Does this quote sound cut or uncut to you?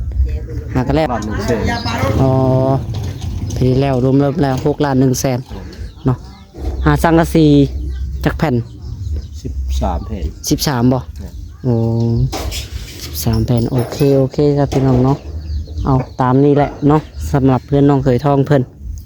cut